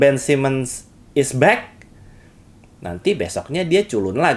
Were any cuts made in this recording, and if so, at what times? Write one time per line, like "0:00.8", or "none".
none

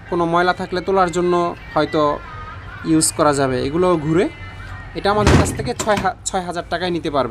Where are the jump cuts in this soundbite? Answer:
none

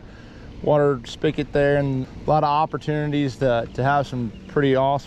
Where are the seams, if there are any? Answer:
0:02.1

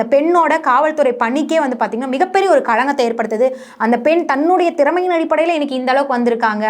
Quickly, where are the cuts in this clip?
none

